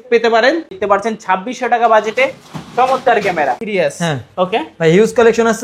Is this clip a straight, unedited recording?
no; 2 cuts; at 0.8 s, 3.6 s

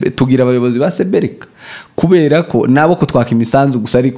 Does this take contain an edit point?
no; 0 cuts

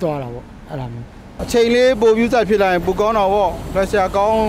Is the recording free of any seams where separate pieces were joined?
no; 1 cut; at 1.2 s

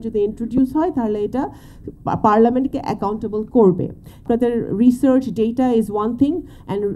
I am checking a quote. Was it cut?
yes; 1 cut; at 4.1 s

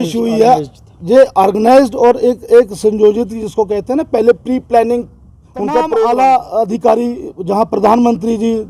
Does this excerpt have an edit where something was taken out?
yes; 1 cut; at 6.0 s

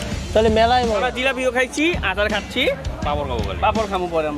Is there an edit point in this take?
no; 0 cuts

